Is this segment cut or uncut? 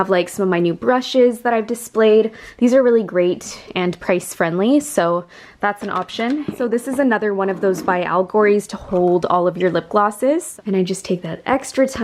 cut